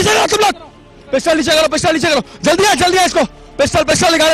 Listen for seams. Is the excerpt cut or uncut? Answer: uncut